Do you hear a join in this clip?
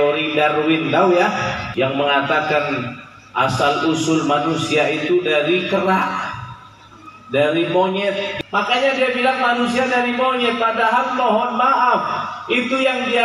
yes; 2 cuts; at 1.6 s, 8.3 s

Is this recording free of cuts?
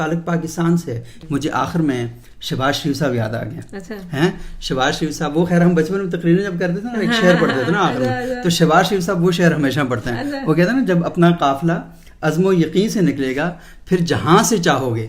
no; 1 cut; at 1.1 s

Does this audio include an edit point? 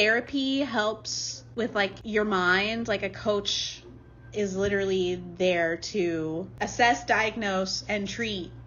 no; 0 cuts

